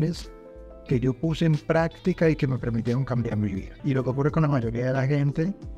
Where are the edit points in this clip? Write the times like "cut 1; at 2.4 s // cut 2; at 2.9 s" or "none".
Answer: cut 1; at 3.7 s

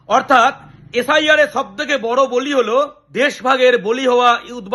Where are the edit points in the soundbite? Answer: cut 1; at 3.0 s

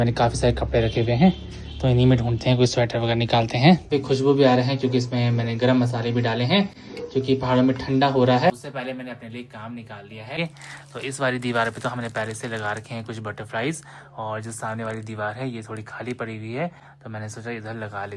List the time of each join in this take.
cut 1; at 3.9 s // cut 2; at 8.5 s // cut 3; at 10.4 s

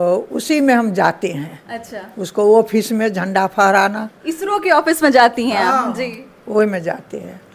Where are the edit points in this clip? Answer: none

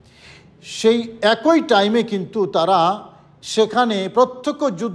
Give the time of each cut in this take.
none

